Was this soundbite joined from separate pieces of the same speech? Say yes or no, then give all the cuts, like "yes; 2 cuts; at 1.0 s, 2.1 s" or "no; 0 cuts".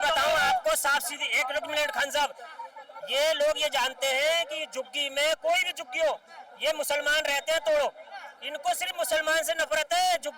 no; 0 cuts